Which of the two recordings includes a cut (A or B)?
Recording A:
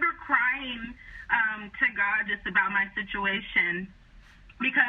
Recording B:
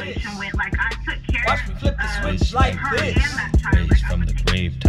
B